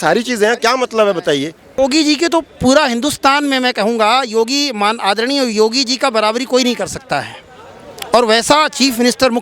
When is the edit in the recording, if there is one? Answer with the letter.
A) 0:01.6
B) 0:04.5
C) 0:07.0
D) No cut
A